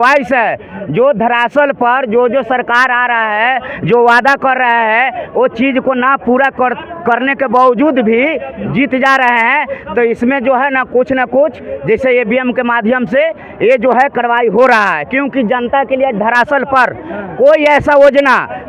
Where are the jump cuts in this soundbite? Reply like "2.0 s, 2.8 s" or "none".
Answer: none

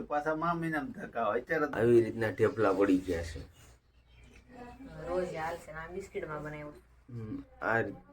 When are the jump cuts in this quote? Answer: 1.7 s

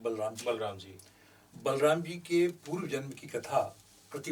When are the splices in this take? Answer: none

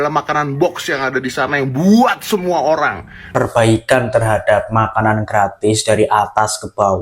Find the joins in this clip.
3.3 s

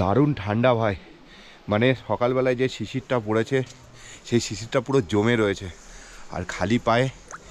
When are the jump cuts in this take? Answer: none

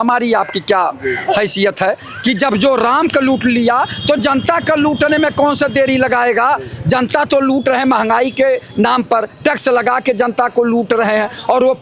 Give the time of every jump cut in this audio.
none

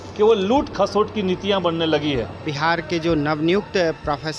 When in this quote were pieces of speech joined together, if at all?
2.5 s

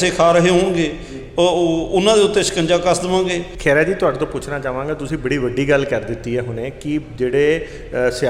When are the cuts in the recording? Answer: 3.5 s

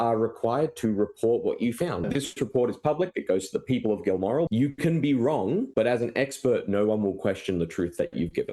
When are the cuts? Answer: 2.1 s, 4.5 s, 5.7 s

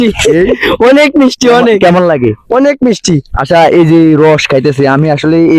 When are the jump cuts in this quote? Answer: none

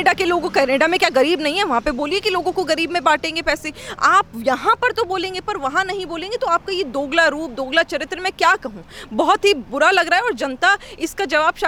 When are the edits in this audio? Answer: none

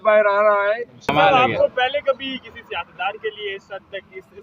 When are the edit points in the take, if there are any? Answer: 1.1 s

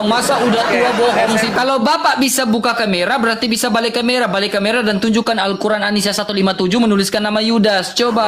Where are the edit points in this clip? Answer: 1.5 s

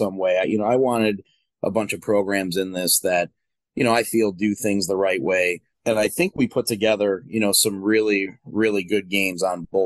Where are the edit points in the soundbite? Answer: 5.7 s

